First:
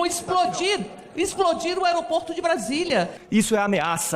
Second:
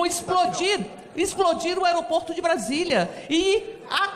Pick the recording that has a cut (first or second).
first